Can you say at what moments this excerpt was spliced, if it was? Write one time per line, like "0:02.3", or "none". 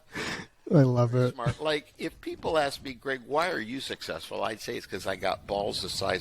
0:01.5